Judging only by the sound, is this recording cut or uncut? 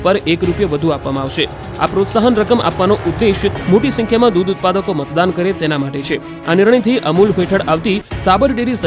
uncut